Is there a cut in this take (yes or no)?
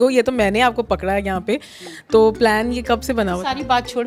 no